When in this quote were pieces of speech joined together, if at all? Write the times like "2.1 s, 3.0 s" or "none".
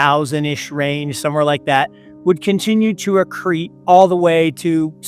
3.7 s